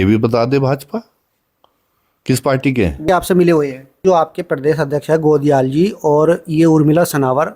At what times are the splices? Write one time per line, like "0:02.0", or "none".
0:03.0
0:04.0